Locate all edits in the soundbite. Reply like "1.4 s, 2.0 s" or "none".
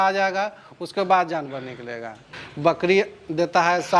2.3 s